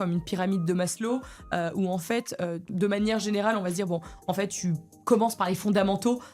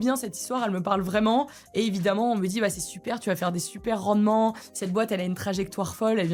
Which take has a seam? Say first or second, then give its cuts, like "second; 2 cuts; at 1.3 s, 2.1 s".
first; 1 cut; at 2.7 s